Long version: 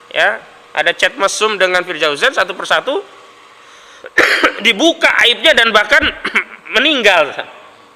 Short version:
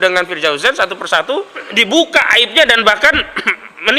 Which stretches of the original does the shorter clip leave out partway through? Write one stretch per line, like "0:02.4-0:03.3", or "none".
0:03.3-0:04.6